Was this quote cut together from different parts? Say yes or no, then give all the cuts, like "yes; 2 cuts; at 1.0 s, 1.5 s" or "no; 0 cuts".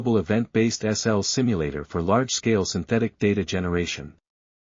no; 0 cuts